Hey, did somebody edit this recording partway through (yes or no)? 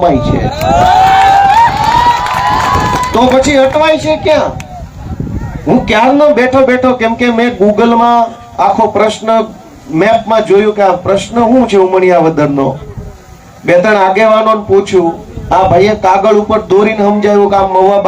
no